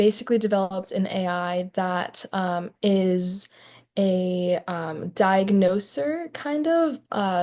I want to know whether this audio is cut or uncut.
uncut